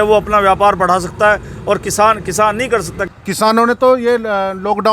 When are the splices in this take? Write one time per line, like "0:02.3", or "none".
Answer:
0:03.0